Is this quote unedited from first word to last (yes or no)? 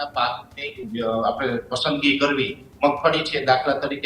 yes